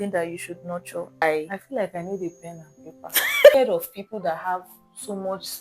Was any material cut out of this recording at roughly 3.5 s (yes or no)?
yes